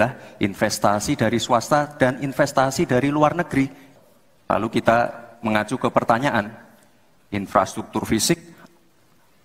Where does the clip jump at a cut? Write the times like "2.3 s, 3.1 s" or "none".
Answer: 3.8 s